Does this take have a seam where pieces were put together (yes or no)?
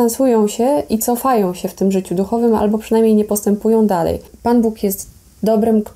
yes